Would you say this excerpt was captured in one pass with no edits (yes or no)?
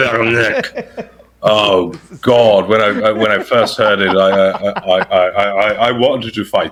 yes